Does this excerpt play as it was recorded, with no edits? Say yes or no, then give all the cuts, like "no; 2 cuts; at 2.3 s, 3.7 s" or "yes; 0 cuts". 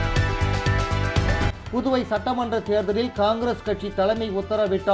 no; 1 cut; at 1.3 s